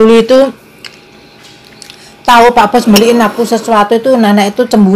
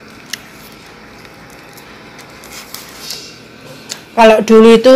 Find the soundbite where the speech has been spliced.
second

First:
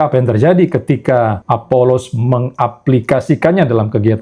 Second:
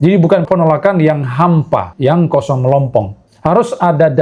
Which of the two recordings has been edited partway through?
first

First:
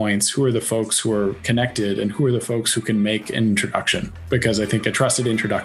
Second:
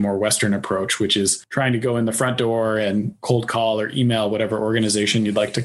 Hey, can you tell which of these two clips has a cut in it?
second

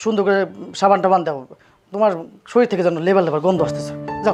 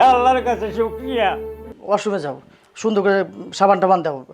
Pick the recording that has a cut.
second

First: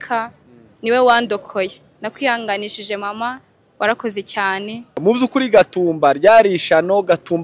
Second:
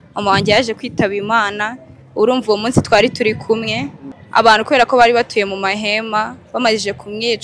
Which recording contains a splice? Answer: first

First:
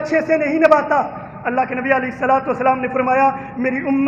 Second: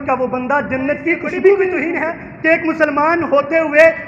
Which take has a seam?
second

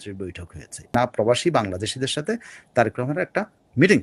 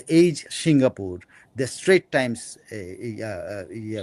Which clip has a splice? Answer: first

